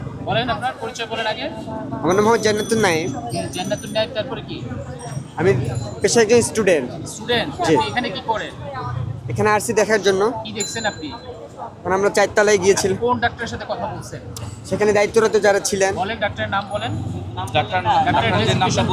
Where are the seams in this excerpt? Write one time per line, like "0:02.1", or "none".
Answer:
none